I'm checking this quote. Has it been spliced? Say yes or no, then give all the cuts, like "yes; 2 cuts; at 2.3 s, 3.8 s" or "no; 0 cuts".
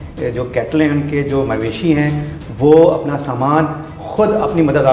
no; 0 cuts